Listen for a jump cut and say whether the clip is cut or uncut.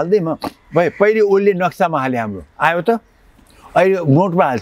uncut